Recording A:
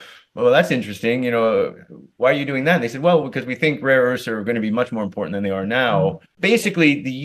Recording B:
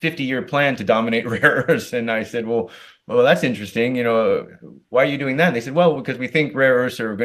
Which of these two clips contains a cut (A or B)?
A